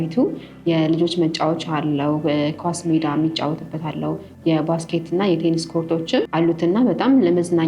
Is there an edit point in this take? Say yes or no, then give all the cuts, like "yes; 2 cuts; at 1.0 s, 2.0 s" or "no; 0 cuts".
yes; 1 cut; at 6.3 s